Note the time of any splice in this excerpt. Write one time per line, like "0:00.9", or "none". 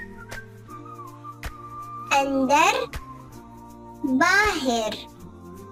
none